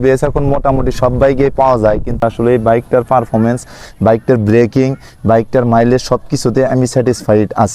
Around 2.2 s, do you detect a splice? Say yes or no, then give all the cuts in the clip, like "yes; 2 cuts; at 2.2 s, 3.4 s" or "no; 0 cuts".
yes; 1 cut; at 2.2 s